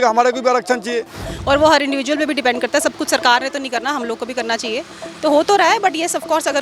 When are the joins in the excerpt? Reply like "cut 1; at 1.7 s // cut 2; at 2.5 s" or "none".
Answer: cut 1; at 1.2 s